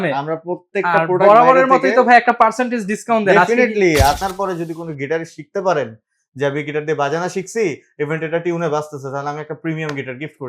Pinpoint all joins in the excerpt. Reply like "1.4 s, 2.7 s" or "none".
4.2 s